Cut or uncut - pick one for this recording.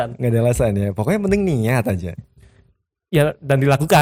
uncut